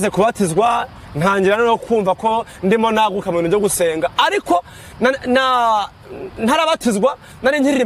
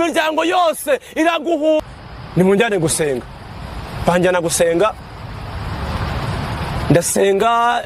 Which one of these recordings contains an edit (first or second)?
second